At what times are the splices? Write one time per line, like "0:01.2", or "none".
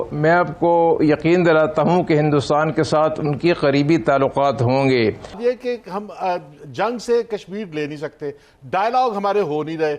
0:05.3